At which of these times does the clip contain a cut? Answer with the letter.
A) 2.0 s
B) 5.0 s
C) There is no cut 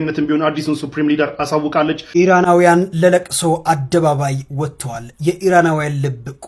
A